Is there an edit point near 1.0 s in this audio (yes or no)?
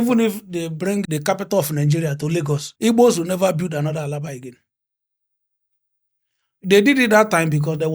yes